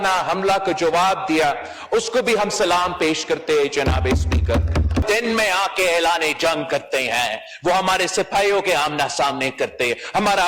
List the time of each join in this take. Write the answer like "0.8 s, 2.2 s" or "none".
5.0 s